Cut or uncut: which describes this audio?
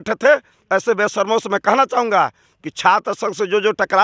uncut